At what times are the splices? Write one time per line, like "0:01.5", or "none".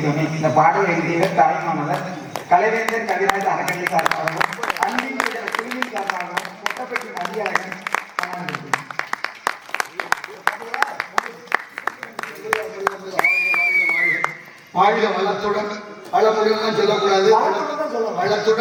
none